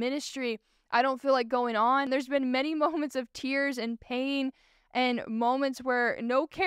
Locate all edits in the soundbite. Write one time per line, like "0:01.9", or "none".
0:02.1